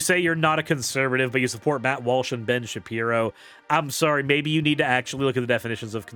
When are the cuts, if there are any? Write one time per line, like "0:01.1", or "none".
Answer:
none